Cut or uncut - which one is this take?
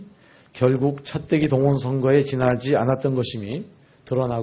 cut